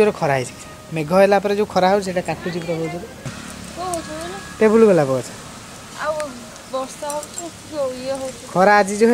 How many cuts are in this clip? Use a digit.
1